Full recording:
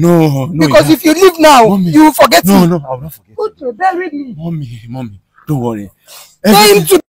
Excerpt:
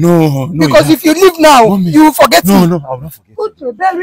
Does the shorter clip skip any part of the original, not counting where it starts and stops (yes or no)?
no